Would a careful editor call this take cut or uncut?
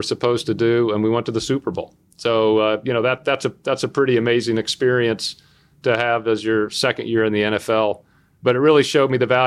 uncut